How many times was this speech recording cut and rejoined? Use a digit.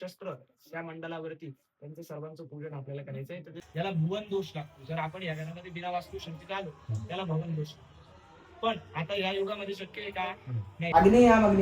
2